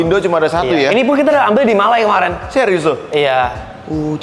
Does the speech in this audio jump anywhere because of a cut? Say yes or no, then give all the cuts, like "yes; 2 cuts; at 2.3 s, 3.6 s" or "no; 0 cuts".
no; 0 cuts